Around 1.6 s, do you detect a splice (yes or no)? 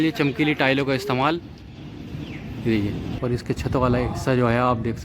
no